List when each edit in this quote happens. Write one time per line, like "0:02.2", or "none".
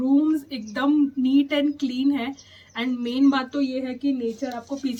none